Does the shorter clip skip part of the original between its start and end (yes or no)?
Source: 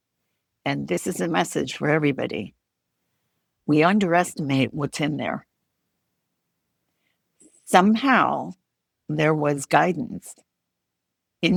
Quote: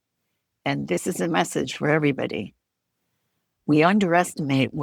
no